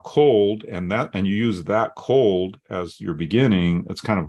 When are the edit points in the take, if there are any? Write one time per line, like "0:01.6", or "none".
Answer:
none